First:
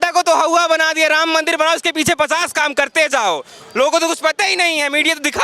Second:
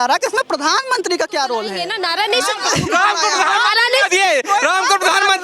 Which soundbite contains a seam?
second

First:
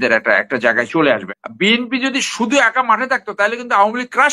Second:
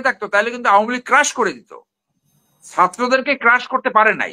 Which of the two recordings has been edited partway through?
first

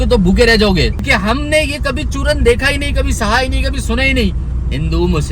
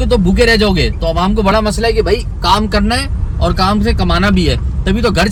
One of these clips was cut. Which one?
first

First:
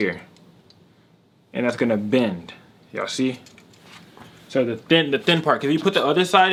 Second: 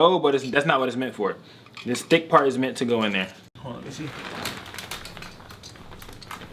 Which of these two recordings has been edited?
second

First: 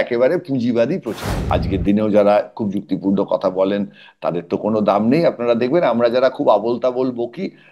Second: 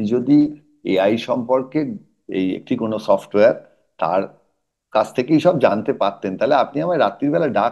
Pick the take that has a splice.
first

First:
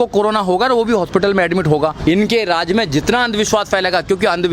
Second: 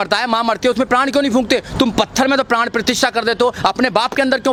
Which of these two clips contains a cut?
first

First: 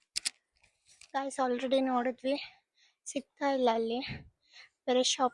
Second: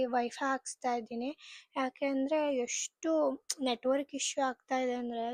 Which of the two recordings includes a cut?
first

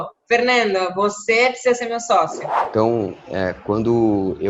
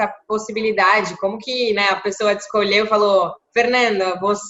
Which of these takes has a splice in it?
first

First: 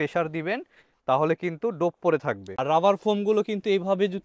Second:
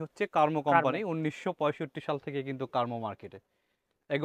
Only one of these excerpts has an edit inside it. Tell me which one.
first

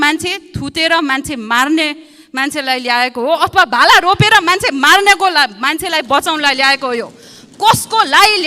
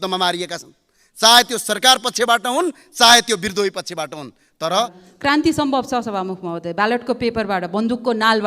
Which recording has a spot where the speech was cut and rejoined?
second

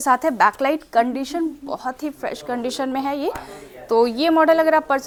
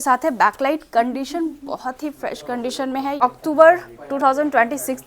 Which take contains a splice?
second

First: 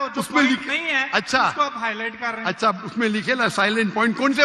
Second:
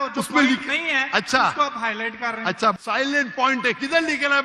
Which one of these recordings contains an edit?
second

